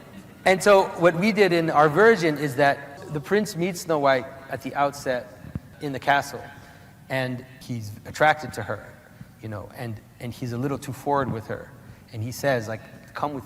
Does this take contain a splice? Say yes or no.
yes